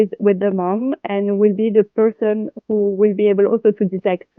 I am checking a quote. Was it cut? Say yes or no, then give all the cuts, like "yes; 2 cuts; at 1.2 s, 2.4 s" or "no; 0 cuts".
no; 0 cuts